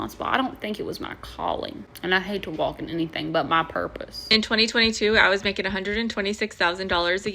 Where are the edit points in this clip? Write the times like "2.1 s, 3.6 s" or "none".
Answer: 1.9 s, 4.1 s